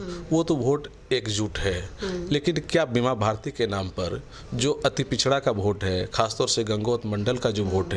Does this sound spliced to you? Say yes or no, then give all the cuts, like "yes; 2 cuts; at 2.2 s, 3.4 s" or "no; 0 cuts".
no; 0 cuts